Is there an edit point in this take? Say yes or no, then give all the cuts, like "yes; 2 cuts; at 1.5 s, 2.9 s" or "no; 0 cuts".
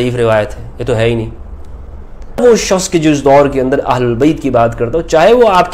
yes; 1 cut; at 2.4 s